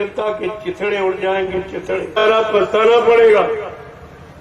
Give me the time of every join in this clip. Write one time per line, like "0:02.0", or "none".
0:02.2